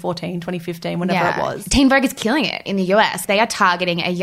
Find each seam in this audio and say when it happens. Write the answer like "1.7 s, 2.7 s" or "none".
1.6 s, 3.2 s